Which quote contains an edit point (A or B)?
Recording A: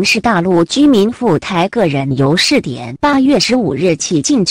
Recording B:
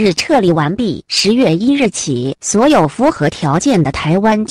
A